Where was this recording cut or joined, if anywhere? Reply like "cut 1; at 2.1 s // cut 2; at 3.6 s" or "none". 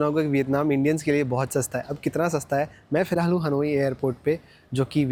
none

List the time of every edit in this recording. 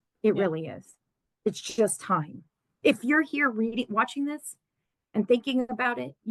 none

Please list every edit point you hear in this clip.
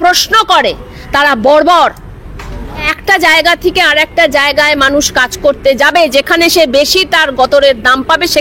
cut 1; at 2.9 s

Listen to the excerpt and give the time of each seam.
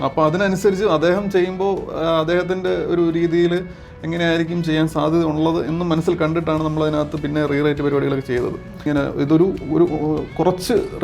cut 1; at 8.8 s

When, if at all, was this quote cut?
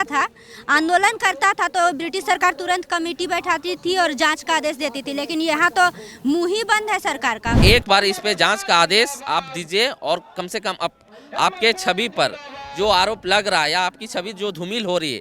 cut 1; at 7.6 s

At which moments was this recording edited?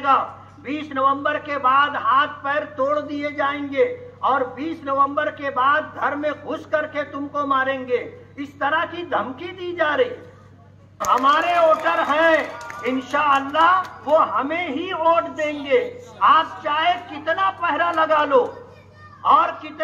cut 1; at 11.0 s

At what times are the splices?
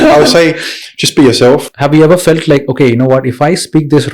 cut 1; at 1.7 s

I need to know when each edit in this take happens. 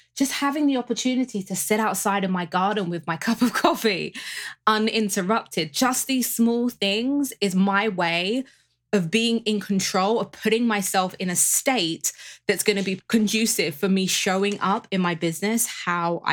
cut 1; at 13.0 s

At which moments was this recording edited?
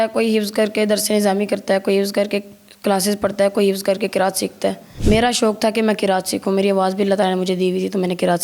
cut 1; at 4.9 s

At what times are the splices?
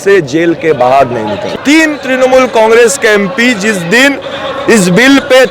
cut 1; at 1.5 s

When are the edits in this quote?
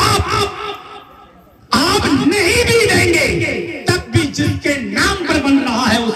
none

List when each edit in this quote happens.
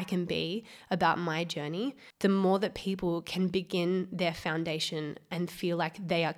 cut 1; at 2.0 s

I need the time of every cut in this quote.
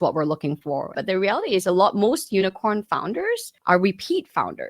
cut 1; at 0.9 s

